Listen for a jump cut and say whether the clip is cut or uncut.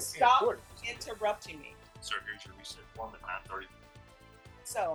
uncut